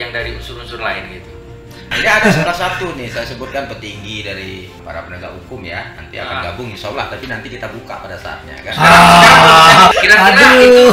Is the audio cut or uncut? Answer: cut